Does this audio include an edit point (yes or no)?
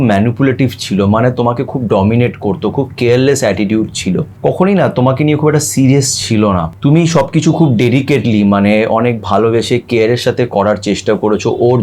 yes